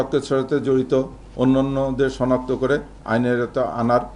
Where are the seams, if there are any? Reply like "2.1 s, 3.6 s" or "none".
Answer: none